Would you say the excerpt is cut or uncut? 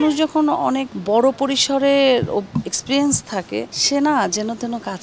cut